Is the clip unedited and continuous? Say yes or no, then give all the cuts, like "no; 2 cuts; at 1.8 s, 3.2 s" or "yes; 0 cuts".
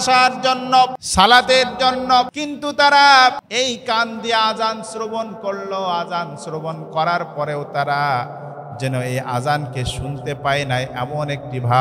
no; 3 cuts; at 1.0 s, 2.4 s, 3.4 s